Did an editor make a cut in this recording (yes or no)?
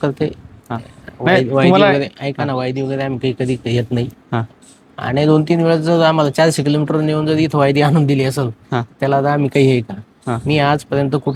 no